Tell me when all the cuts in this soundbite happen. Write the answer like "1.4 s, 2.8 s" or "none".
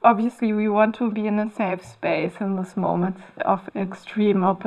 none